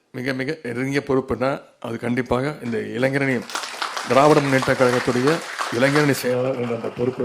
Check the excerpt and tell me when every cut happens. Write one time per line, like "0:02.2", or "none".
none